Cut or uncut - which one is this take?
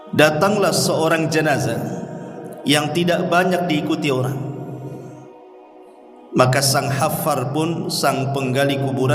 cut